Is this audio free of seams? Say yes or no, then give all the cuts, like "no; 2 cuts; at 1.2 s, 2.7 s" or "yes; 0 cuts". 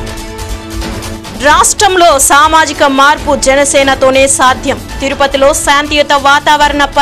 yes; 0 cuts